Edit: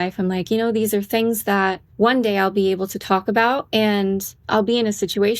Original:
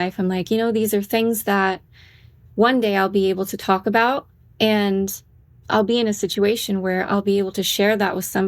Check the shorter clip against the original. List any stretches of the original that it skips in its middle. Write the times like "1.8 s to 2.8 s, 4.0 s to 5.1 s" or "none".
1.8 s to 2.4 s, 4.2 s to 4.5 s, 5.2 s to 5.5 s